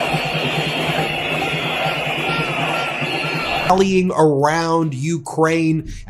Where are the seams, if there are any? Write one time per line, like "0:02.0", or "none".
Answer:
0:03.6